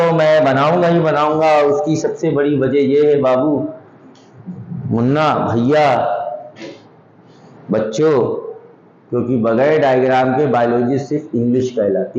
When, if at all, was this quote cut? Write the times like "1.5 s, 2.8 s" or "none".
none